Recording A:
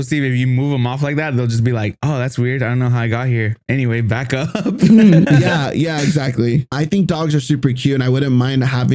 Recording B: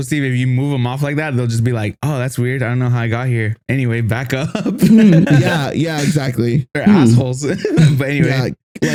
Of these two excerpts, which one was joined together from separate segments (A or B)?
A